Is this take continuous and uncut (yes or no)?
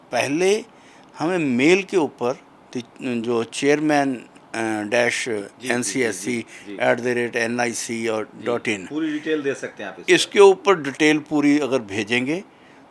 yes